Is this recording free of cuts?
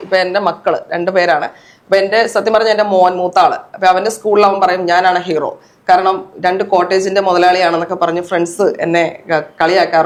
yes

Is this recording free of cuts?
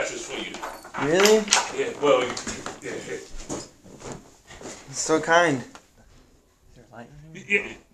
no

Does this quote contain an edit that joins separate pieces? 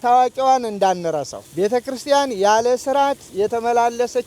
yes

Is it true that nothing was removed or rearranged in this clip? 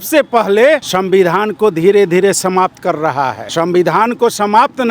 no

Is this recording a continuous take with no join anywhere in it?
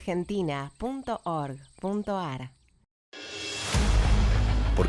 no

